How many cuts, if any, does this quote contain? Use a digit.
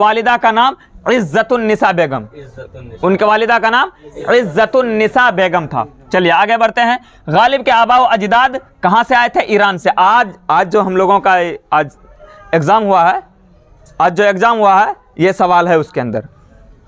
0